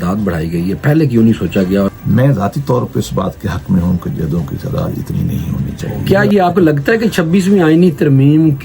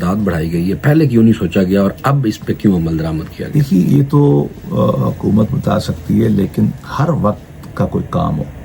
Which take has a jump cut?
first; 2 cuts; at 2.0 s, 5.9 s

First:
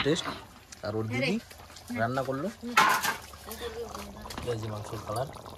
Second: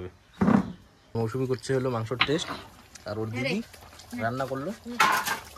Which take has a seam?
second; 1 cut; at 0.9 s

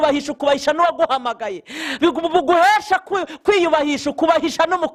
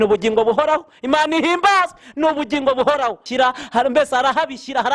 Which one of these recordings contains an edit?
second; 1 cut; at 3.2 s

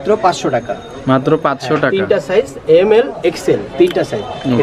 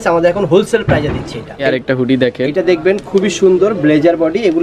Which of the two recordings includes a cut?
second; 1 cut; at 1.6 s

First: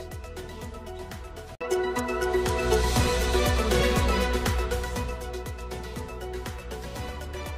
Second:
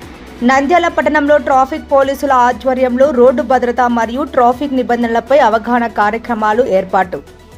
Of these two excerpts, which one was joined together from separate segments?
first; 2 cuts; at 1.6 s, 6.4 s

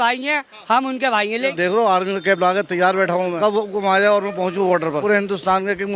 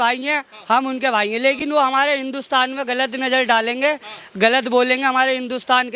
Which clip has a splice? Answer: first; 3 cuts; at 1.4 s, 3.4 s, 5.0 s

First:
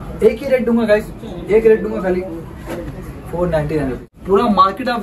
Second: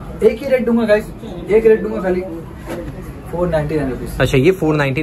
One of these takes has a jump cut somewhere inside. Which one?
first; 1 cut; at 4.0 s

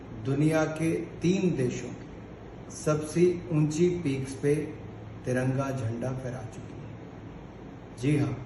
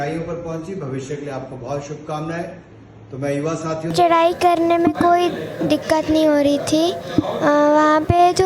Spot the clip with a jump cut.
second; 1 cut; at 3.9 s

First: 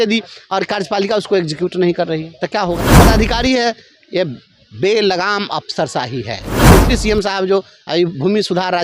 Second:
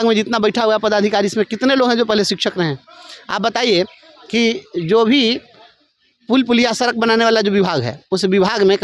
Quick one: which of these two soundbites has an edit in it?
first; 2 cuts; at 3.0 s, 6.5 s

